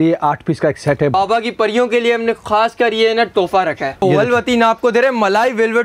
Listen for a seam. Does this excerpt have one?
yes; 2 cuts; at 1.1 s, 3.9 s

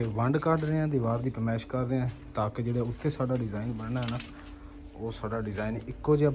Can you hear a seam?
no; 0 cuts

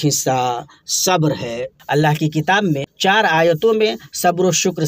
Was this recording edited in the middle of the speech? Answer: yes; 2 cuts; at 1.7 s, 2.9 s

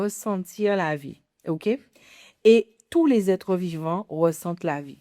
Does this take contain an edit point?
no; 0 cuts

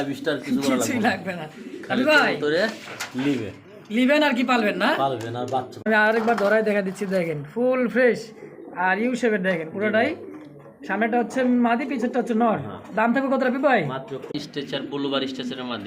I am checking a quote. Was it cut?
yes; 2 cuts; at 5.8 s, 14.3 s

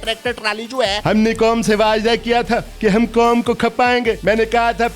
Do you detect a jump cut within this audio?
yes; 3 cuts; at 1.0 s, 2.7 s, 4.2 s

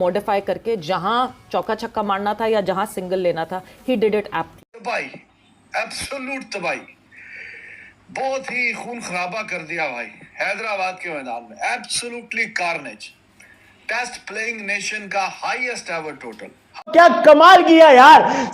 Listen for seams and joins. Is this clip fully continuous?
no; 2 cuts; at 4.6 s, 16.9 s

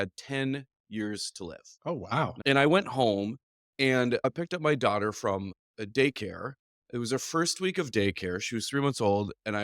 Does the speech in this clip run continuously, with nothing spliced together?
no; 1 cut; at 2.4 s

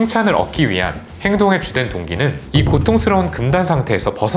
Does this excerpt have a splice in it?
yes; 1 cut; at 2.5 s

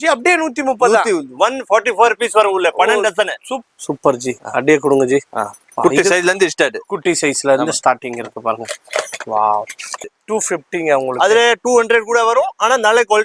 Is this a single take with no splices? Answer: no; 2 cuts; at 3.5 s, 10.1 s

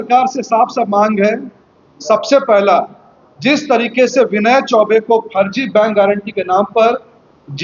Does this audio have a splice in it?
no; 0 cuts

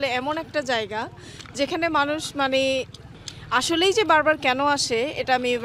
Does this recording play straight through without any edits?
yes; 0 cuts

